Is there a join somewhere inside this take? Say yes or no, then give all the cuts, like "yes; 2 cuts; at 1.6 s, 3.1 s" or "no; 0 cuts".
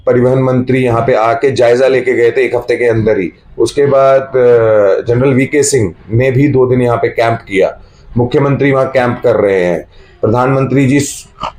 no; 0 cuts